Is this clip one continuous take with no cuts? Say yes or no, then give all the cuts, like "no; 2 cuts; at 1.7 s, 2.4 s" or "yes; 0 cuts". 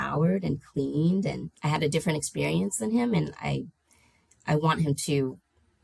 no; 1 cut; at 1.5 s